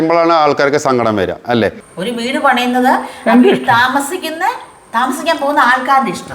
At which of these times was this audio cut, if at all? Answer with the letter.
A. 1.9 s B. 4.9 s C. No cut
A